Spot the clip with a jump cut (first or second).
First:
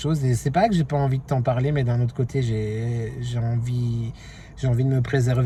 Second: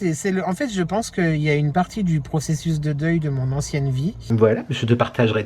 second